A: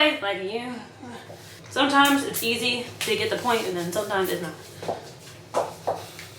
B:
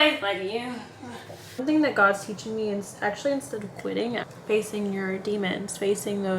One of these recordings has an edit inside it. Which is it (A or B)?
B